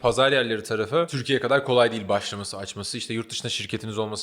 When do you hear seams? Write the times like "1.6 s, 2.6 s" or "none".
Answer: 1.2 s